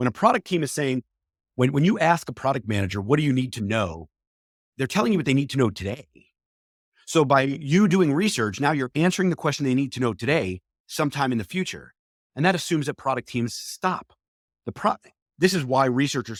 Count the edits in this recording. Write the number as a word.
zero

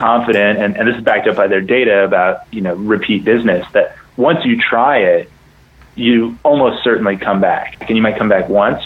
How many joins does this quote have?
one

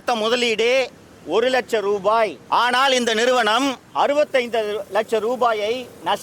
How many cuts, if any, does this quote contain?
two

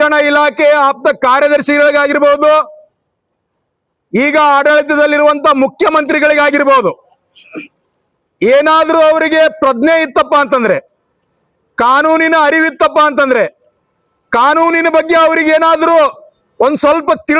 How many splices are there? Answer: zero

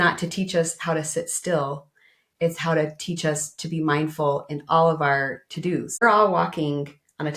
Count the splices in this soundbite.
one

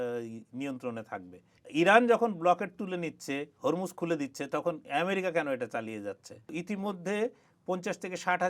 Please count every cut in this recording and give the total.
two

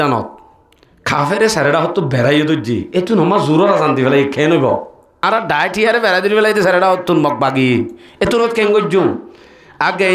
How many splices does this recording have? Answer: one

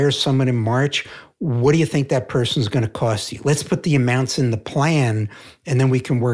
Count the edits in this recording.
one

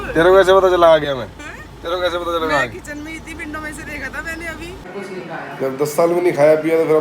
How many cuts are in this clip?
one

